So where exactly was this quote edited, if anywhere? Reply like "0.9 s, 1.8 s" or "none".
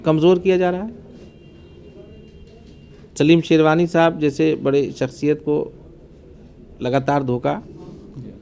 none